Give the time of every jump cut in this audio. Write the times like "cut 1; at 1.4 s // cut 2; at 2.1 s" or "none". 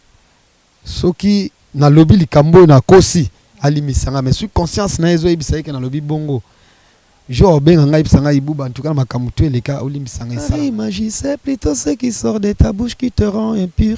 cut 1; at 10.5 s